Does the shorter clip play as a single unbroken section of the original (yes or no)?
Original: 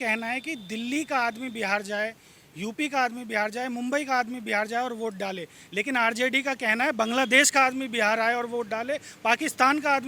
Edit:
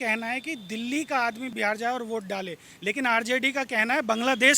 no